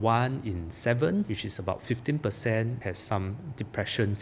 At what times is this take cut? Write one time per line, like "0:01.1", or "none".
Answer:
0:01.3
0:02.8